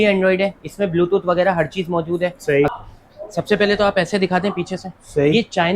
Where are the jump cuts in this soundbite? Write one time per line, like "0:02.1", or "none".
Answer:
0:02.7